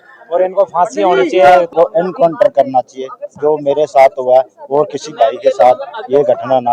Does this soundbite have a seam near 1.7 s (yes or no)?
yes